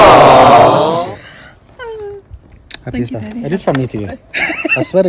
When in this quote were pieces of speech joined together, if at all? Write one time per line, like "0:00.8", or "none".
0:01.1